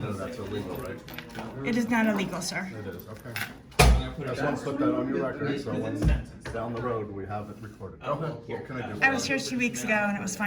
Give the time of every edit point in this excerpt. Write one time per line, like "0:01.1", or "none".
none